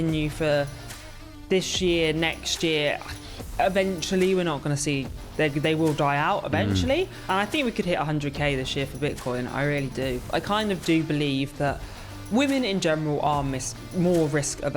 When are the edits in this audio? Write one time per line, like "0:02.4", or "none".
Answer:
0:07.2
0:10.2